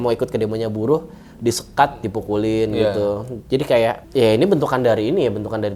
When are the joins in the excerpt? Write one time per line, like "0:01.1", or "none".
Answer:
0:04.0